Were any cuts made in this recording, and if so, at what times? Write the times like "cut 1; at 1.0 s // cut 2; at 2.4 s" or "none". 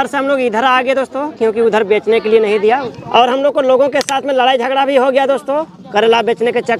cut 1; at 2.9 s